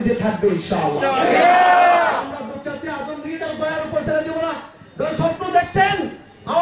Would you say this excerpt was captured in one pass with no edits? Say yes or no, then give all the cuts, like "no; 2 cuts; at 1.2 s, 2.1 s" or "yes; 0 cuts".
yes; 0 cuts